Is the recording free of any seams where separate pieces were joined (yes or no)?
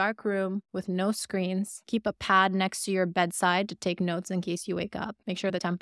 yes